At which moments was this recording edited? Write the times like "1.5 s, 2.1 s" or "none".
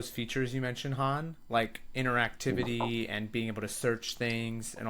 none